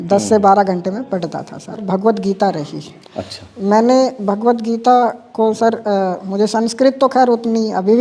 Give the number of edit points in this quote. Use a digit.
1